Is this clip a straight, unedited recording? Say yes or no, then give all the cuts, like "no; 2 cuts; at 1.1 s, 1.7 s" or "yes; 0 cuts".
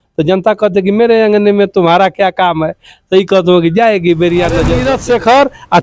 no; 1 cut; at 4.9 s